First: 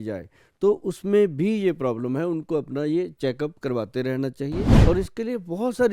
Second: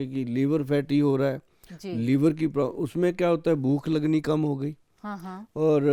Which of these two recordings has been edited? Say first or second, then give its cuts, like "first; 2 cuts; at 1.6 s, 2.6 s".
first; 1 cut; at 4.7 s